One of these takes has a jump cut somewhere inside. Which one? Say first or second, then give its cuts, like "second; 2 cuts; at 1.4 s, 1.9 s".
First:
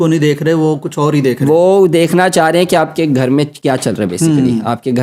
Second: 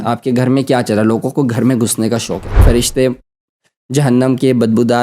second; 1 cut; at 2.6 s